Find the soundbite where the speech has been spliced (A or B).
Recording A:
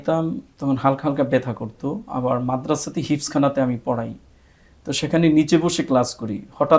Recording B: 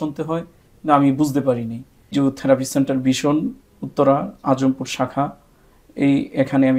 B